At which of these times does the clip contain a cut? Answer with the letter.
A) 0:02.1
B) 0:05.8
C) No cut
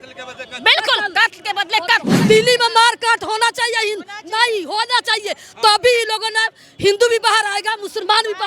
A